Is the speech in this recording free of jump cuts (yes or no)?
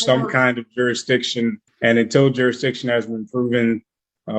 no